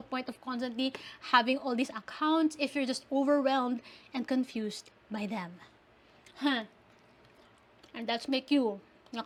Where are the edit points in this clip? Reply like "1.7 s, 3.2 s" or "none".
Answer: none